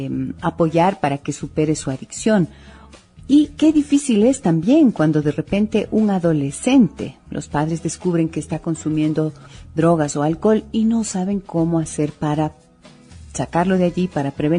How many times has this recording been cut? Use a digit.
1